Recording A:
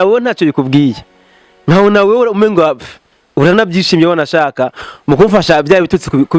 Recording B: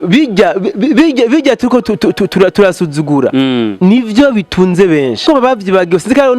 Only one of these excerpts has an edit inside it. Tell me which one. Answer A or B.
B